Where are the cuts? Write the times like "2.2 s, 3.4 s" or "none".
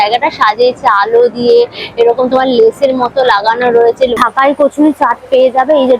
4.2 s